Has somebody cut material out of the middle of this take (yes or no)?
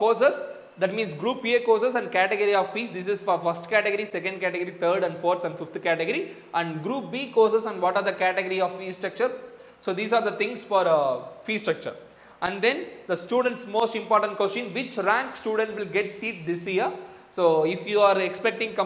no